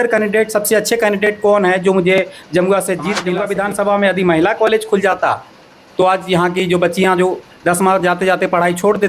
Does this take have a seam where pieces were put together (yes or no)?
yes